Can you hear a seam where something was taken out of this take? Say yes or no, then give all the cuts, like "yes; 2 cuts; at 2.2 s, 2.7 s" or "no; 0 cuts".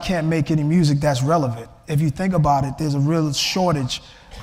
no; 0 cuts